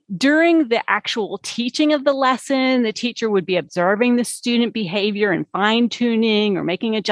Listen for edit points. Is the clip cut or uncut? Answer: uncut